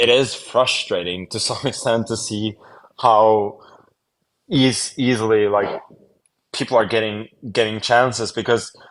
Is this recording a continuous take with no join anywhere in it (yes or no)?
yes